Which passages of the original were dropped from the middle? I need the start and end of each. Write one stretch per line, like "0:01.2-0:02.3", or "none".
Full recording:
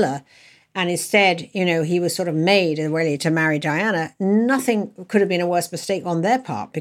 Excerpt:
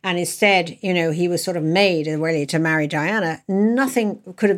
none